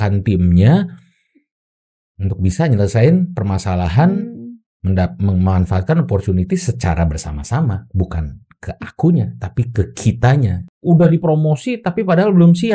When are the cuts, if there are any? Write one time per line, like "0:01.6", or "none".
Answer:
0:10.7